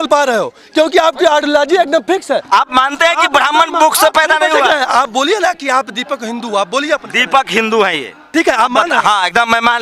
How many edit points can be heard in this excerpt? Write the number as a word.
one